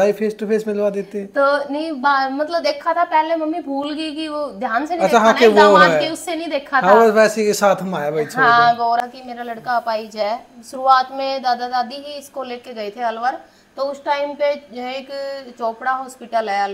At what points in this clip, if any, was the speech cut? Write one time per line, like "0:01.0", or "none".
0:09.0